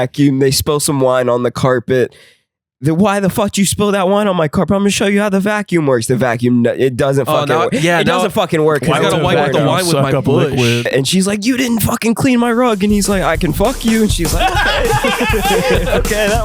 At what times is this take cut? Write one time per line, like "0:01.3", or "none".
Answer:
0:10.9